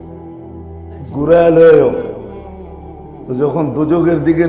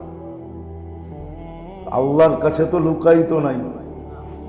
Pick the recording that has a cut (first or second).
first